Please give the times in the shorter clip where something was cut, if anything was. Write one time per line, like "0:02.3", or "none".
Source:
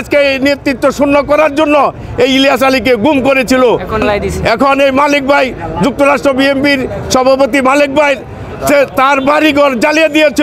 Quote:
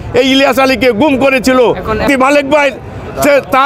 0:02.0